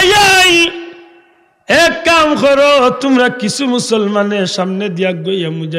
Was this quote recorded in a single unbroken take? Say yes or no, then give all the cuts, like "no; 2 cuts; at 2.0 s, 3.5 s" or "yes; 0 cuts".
yes; 0 cuts